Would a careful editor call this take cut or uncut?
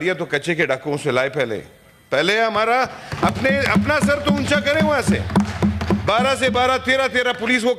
uncut